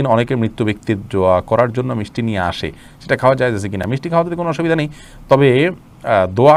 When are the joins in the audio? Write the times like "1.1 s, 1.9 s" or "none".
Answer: none